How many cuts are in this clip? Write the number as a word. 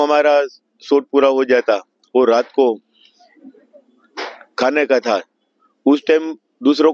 zero